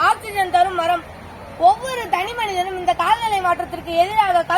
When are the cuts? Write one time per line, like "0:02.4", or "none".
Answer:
none